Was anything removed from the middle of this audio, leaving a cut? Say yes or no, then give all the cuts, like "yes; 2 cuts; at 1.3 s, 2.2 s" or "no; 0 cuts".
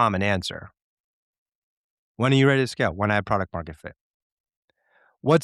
no; 0 cuts